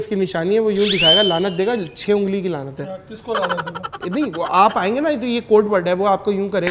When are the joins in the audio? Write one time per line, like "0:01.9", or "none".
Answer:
none